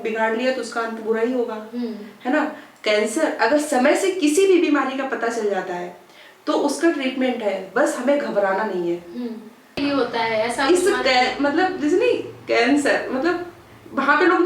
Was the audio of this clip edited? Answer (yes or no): yes